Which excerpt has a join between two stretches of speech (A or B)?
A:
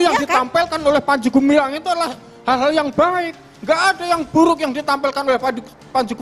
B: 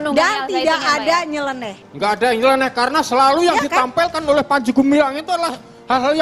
B